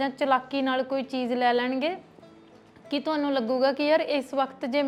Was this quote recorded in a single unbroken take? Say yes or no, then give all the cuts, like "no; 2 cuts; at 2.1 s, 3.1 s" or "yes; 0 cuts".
yes; 0 cuts